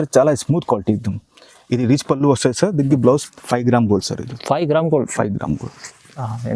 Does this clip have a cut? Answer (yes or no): yes